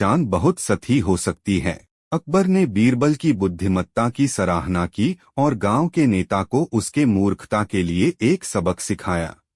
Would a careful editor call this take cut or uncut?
cut